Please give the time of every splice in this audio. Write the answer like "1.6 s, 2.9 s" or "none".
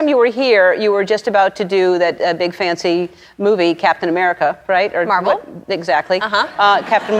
none